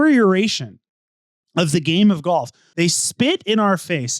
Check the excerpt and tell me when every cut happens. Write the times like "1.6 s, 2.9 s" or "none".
2.6 s

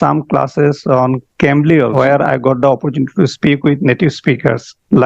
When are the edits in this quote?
1.9 s

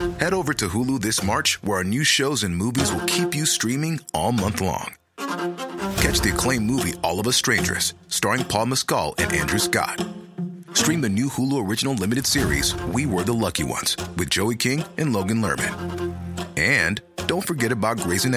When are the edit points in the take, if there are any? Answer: none

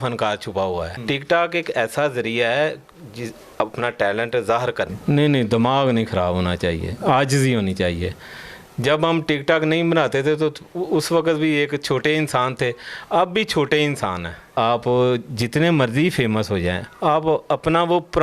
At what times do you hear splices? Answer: 0.9 s, 5.0 s, 14.5 s

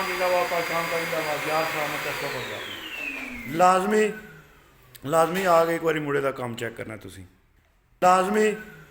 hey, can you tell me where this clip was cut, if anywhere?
8.0 s

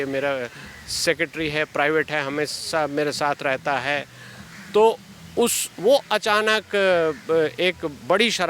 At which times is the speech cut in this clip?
none

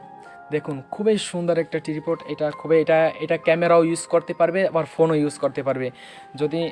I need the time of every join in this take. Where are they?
none

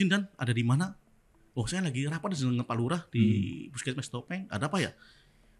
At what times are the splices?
none

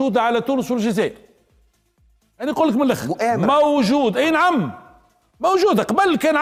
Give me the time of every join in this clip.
none

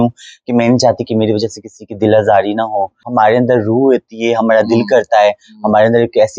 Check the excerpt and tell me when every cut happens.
3.0 s

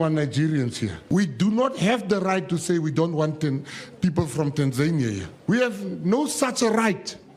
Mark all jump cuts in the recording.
0.9 s, 5.3 s

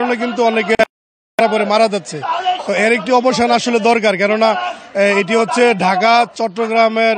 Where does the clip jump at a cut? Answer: none

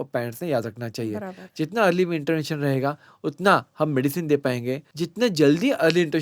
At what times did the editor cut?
4.9 s

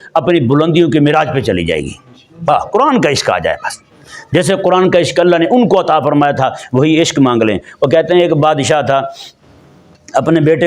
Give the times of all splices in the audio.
none

